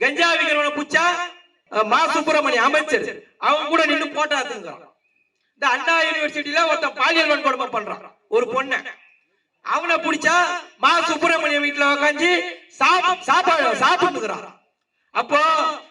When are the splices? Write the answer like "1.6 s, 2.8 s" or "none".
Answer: 1.6 s